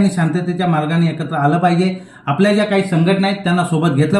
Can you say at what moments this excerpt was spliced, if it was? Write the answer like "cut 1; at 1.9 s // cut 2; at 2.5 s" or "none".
none

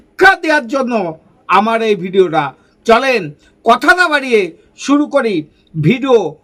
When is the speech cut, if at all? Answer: none

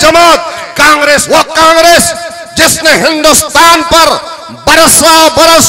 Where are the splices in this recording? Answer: cut 1; at 1.2 s

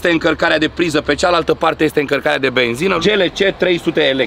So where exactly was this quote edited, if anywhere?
cut 1; at 3.0 s

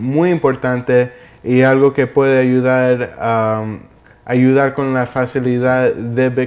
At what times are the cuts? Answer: cut 1; at 3.0 s

